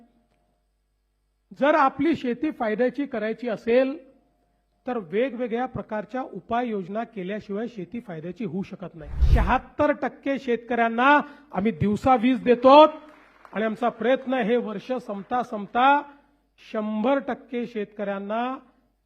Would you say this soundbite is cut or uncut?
cut